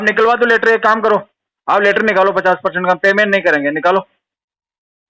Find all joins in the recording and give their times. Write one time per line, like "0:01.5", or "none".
none